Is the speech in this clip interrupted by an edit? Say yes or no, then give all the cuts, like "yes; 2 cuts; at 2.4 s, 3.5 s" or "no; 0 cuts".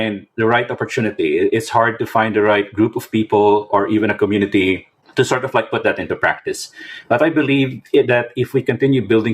yes; 1 cut; at 5.0 s